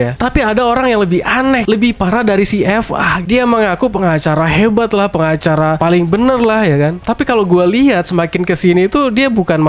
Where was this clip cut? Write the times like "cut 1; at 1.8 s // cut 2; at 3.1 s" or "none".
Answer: cut 1; at 1.6 s // cut 2; at 3.2 s // cut 3; at 5.8 s